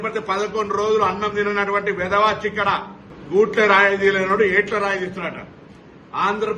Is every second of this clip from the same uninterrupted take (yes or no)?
no